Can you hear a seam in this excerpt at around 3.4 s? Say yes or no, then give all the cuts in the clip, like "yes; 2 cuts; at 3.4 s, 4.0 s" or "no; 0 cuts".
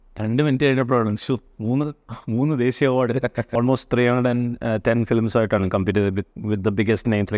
yes; 1 cut; at 3.4 s